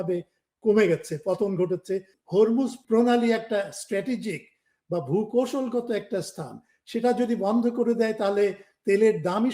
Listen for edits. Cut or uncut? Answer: cut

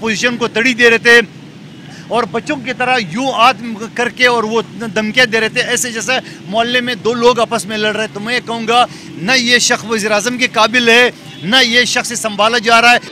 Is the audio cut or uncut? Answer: uncut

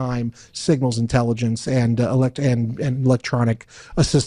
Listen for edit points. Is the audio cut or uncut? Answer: uncut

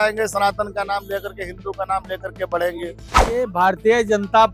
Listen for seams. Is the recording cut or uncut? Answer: cut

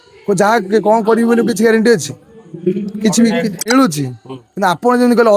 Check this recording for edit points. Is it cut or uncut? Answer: cut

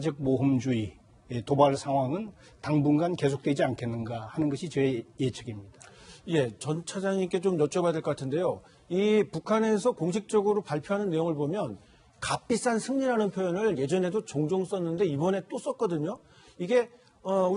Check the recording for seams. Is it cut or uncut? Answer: cut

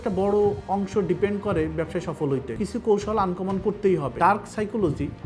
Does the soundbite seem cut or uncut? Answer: cut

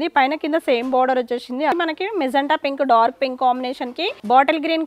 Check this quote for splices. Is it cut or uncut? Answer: cut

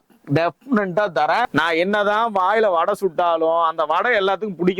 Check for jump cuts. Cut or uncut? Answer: cut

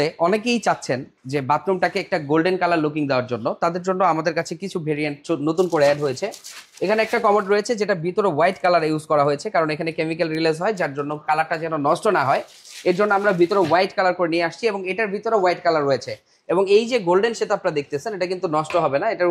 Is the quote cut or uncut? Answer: uncut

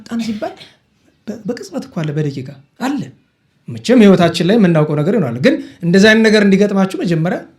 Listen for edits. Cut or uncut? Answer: cut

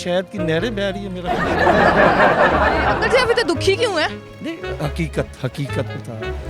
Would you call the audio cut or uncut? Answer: uncut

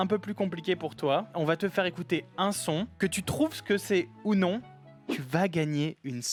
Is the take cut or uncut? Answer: uncut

